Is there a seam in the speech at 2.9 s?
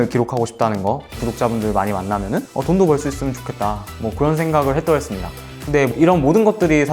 no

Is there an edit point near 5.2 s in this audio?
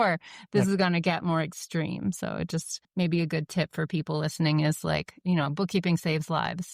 yes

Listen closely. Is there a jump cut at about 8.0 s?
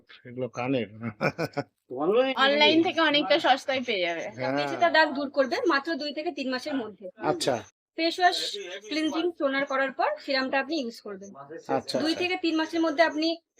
no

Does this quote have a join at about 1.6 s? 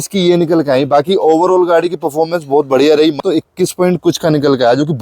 no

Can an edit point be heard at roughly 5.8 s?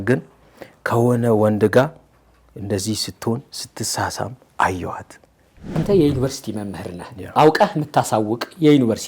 yes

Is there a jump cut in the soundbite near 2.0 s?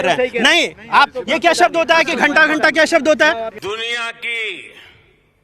no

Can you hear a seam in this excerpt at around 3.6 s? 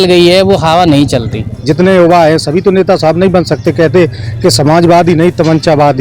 no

